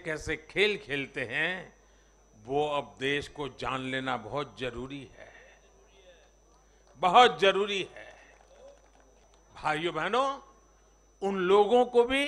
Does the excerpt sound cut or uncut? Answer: cut